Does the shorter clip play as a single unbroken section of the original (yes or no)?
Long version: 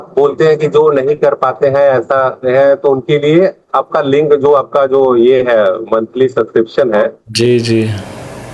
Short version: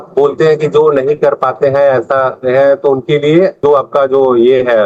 no